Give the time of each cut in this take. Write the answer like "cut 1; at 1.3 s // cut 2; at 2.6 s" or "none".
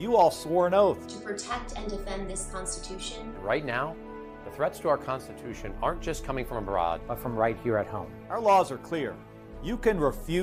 none